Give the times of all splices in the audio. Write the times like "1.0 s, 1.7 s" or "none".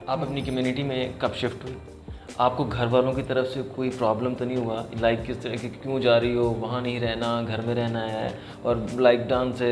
none